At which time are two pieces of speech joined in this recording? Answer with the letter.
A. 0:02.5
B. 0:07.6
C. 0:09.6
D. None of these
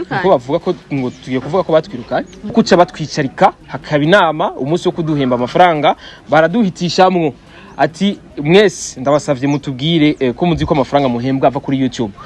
A